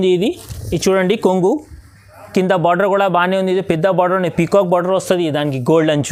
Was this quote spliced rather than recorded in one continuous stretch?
no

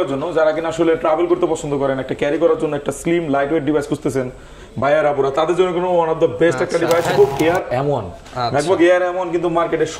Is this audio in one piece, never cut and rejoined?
no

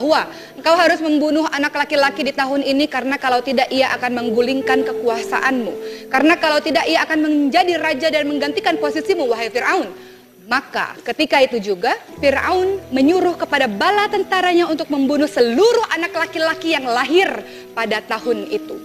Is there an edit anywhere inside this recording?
no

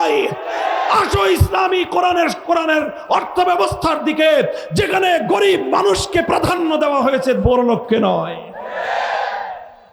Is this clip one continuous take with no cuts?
yes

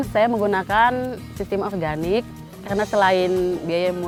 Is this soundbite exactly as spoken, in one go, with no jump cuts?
yes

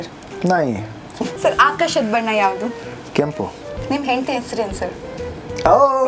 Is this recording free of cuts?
no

